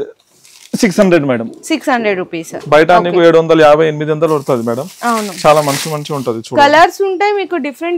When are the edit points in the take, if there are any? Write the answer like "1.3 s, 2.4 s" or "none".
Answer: none